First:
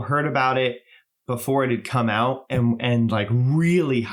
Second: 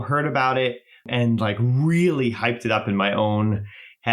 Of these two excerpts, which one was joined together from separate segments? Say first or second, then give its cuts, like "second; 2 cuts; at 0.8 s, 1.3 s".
second; 1 cut; at 1.1 s